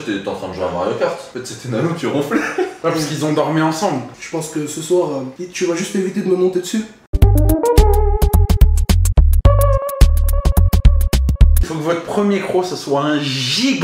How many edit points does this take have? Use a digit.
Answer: 4